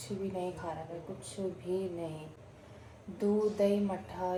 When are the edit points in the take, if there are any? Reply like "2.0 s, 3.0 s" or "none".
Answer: none